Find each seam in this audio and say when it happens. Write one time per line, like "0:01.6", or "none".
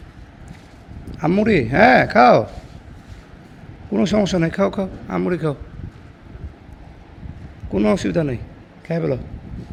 none